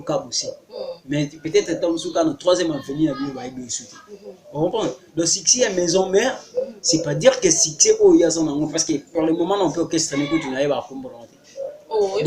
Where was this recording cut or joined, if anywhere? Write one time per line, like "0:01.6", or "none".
none